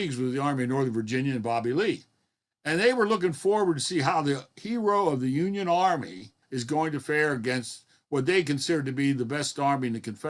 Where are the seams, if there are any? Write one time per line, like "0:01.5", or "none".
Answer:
0:06.5